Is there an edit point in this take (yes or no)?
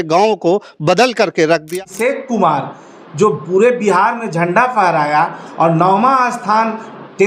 yes